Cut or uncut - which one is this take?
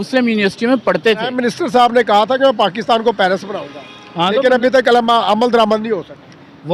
cut